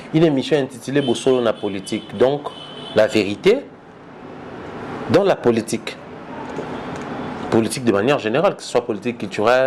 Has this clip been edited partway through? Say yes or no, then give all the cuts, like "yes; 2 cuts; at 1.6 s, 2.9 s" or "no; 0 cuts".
no; 0 cuts